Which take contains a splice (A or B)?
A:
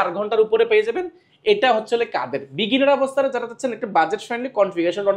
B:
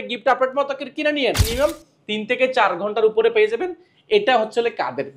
B